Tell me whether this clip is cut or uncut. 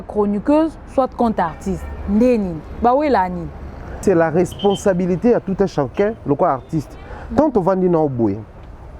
cut